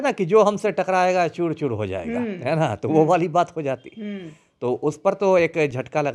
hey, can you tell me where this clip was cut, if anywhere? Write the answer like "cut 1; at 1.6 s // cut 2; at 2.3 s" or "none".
none